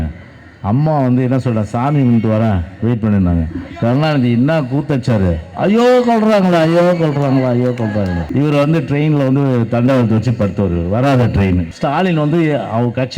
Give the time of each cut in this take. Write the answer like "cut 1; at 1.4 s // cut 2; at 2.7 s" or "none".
cut 1; at 8.3 s // cut 2; at 11.7 s